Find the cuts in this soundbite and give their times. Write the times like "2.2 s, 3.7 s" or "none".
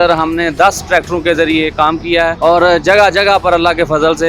2.3 s